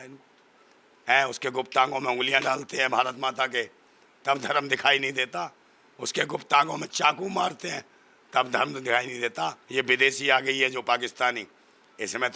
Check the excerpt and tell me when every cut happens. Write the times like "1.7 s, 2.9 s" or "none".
9.6 s